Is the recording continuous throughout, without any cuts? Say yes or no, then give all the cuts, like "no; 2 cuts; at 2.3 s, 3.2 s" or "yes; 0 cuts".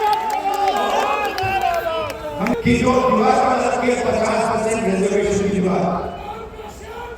no; 1 cut; at 2.5 s